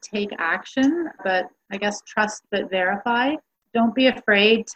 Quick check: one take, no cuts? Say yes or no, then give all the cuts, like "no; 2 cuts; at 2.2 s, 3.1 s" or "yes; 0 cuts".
yes; 0 cuts